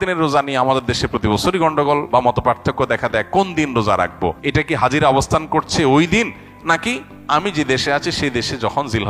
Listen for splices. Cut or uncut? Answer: cut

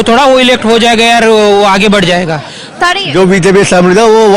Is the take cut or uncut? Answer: cut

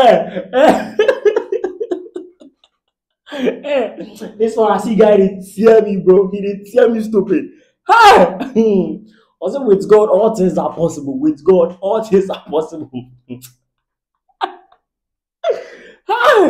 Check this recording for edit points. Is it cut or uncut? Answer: uncut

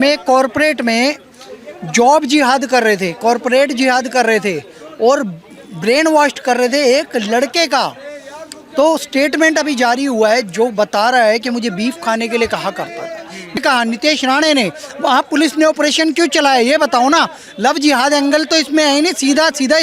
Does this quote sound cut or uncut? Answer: cut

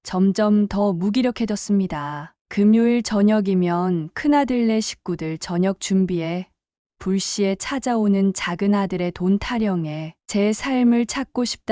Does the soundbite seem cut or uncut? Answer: cut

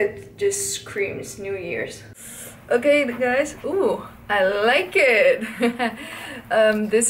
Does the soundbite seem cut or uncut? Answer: uncut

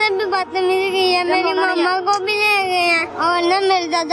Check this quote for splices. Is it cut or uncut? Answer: cut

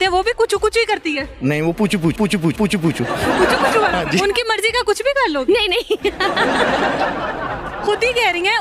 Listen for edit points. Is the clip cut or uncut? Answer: cut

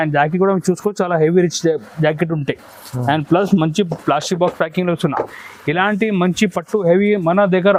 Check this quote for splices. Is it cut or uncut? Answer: uncut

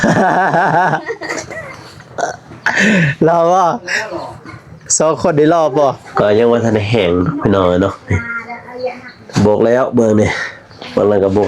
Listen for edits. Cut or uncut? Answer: cut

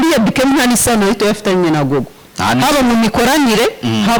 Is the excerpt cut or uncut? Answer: uncut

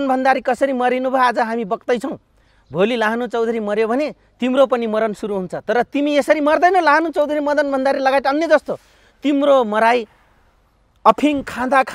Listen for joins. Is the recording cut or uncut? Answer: uncut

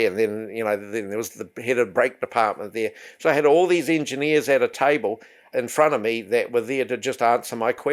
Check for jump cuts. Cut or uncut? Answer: uncut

